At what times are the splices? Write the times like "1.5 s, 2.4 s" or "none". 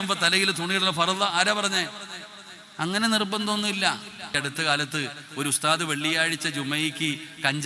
4.4 s